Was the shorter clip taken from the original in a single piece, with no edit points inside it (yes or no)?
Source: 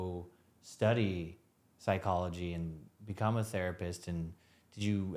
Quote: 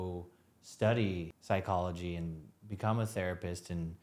no